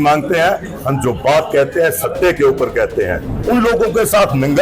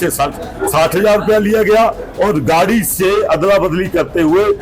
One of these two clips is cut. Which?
first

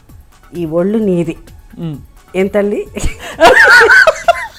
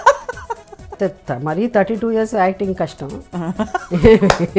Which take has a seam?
second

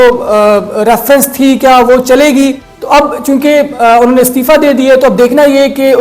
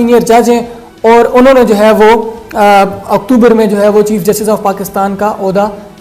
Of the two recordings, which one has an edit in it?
first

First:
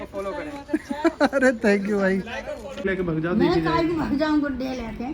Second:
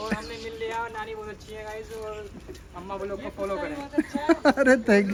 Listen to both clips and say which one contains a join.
first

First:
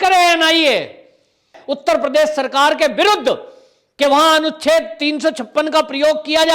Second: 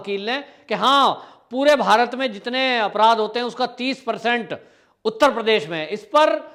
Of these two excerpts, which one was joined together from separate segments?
first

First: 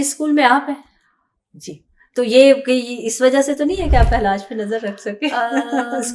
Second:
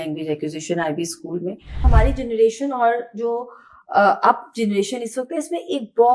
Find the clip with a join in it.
second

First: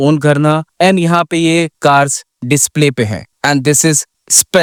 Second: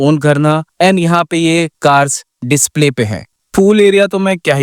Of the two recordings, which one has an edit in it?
second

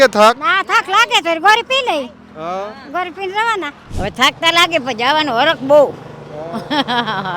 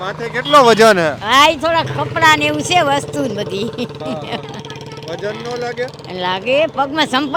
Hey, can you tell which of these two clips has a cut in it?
first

